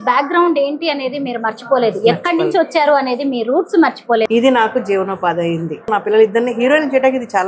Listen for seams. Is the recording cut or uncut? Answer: cut